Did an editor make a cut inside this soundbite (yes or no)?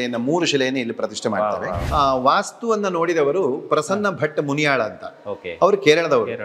yes